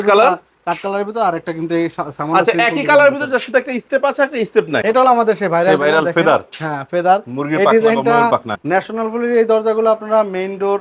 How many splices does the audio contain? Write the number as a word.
two